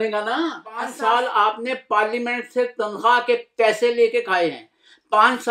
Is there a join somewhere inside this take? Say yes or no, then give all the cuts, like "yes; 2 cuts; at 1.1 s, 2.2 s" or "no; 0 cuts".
yes; 1 cut; at 0.9 s